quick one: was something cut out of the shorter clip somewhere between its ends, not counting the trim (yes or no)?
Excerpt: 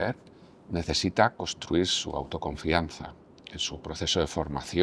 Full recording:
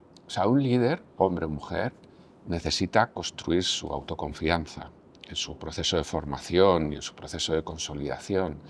no